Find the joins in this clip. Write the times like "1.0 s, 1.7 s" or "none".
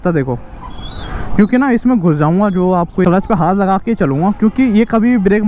3.0 s